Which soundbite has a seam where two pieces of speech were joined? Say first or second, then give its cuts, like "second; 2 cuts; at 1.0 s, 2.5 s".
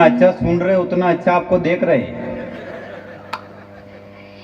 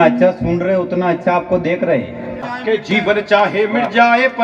second; 1 cut; at 2.5 s